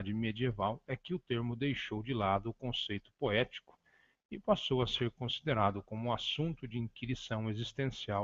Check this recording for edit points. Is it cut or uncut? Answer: cut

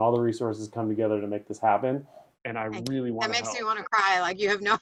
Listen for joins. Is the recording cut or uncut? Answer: uncut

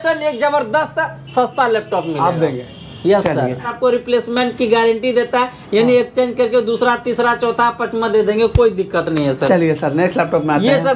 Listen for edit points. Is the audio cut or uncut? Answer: cut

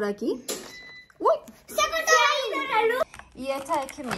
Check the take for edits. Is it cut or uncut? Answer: cut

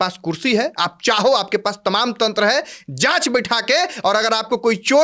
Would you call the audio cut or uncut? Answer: uncut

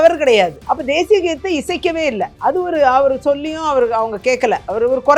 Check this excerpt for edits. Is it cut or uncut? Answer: uncut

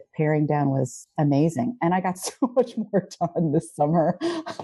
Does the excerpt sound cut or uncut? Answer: uncut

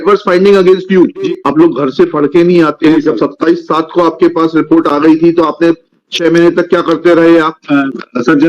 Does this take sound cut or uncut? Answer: cut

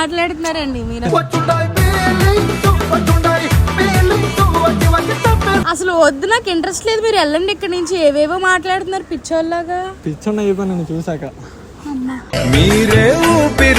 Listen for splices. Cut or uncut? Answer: cut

